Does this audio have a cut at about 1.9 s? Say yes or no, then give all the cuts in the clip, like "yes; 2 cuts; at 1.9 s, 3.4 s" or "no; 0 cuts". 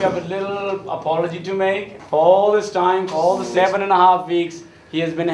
yes; 1 cut; at 1.9 s